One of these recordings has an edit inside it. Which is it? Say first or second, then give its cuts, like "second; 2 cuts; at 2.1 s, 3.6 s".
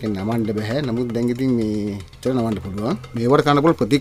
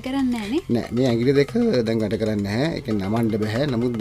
first; 2 cuts; at 2.1 s, 3.1 s